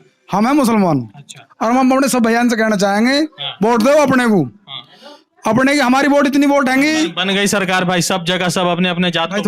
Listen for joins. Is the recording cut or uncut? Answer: uncut